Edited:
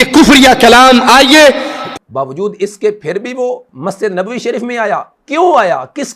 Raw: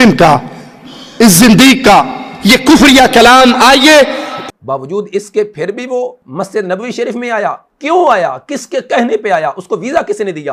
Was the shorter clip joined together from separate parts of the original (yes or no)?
no